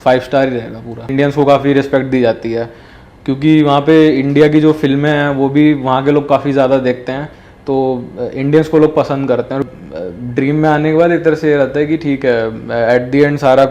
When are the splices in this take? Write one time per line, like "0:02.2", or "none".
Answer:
0:01.1
0:09.6